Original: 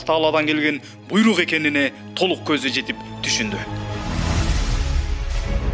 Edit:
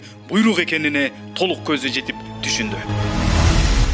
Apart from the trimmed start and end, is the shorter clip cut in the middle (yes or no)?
yes